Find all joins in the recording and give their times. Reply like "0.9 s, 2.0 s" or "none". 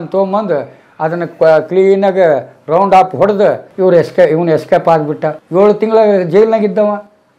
3.7 s, 5.3 s